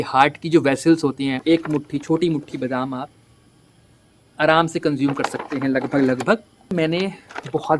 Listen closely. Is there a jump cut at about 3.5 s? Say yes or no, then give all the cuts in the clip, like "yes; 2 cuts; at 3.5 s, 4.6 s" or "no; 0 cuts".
no; 2 cuts; at 1.4 s, 6.7 s